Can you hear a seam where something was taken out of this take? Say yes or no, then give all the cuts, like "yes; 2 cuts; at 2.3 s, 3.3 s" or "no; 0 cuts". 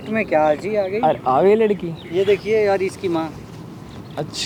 no; 0 cuts